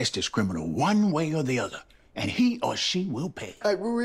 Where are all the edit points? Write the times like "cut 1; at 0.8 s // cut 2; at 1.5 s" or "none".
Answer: none

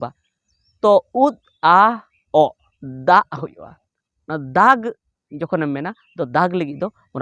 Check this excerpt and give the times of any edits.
none

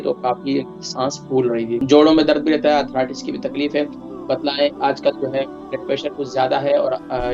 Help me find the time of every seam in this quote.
cut 1; at 1.8 s

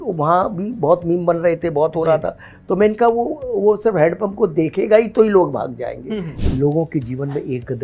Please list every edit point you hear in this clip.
cut 1; at 6.3 s

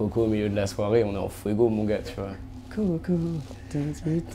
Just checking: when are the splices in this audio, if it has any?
none

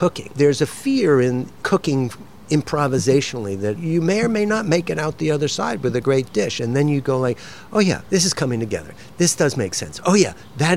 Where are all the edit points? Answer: cut 1; at 1.5 s // cut 2; at 3.8 s // cut 3; at 8.0 s

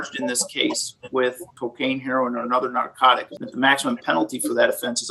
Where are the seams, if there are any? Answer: cut 1; at 1.5 s // cut 2; at 3.3 s

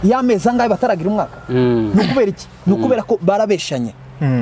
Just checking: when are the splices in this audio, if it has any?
none

